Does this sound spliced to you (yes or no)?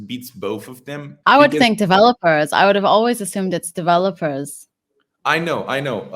yes